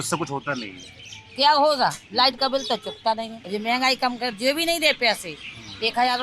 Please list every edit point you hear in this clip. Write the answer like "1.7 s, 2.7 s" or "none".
3.4 s